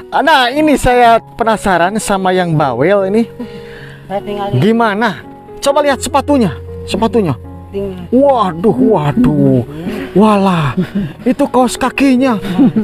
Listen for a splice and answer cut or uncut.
uncut